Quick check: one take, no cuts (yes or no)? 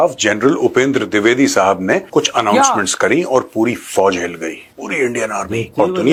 yes